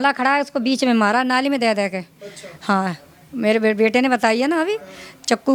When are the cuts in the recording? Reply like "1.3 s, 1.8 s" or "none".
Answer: none

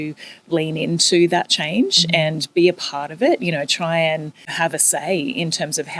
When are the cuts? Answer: 4.5 s

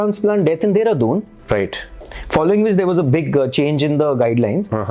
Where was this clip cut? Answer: none

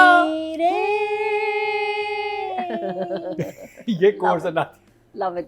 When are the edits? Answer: none

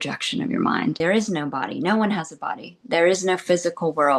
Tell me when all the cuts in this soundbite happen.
1.0 s

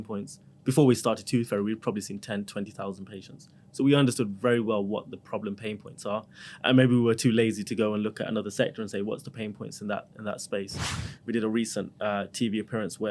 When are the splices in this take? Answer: 10.9 s

